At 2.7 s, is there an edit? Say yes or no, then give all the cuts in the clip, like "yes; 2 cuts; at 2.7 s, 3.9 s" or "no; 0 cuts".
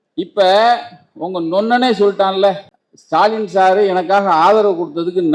no; 0 cuts